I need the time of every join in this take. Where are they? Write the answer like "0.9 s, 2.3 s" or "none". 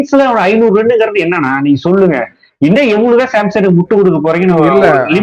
none